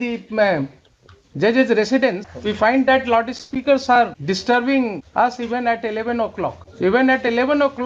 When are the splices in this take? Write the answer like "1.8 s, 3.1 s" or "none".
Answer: 2.3 s, 4.2 s, 5.0 s, 6.6 s

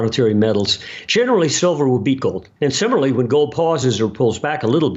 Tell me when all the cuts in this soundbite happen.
2.5 s

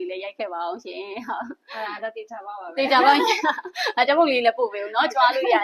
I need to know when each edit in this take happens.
none

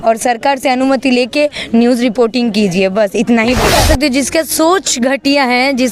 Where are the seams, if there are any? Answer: 3.7 s

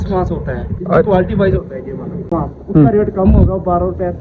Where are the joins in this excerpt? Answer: 2.3 s

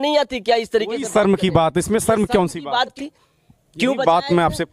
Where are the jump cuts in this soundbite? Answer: 3.0 s

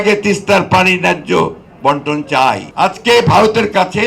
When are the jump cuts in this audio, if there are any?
2.7 s

